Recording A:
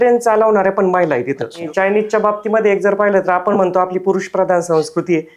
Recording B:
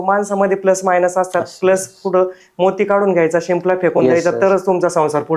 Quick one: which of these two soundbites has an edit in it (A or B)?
A